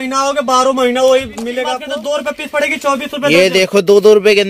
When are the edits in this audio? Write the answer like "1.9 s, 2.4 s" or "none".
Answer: 1.8 s